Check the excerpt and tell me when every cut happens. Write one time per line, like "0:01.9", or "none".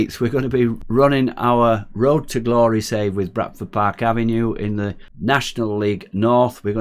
0:00.8
0:05.0